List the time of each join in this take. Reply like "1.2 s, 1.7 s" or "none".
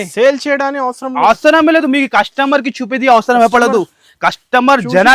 none